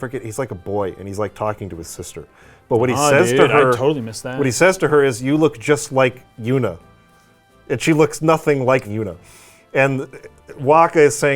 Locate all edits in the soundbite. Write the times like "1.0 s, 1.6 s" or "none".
8.9 s